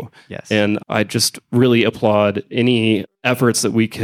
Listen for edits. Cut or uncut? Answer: cut